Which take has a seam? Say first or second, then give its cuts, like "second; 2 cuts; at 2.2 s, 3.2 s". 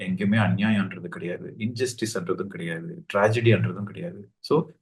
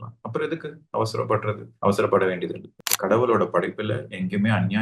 second; 1 cut; at 2.7 s